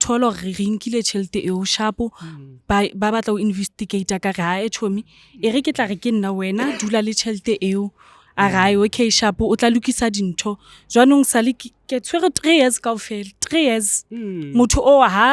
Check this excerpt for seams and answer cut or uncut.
uncut